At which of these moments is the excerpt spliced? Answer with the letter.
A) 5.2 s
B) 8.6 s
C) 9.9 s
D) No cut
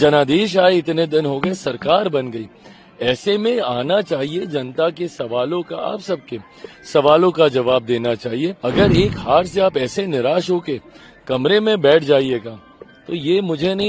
B